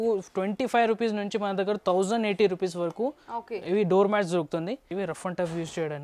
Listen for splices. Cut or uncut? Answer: cut